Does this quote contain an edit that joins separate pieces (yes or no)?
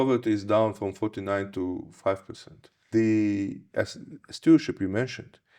yes